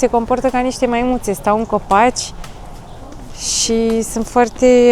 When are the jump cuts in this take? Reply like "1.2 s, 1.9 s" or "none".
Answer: none